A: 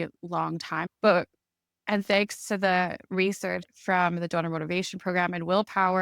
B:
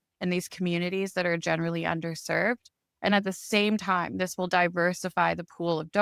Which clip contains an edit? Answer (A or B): A